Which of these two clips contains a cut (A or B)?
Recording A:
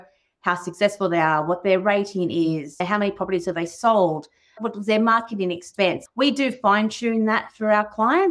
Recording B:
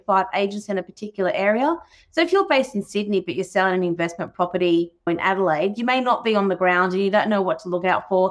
A